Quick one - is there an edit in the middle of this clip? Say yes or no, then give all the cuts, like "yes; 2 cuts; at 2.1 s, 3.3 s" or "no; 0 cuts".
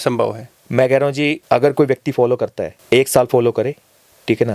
no; 0 cuts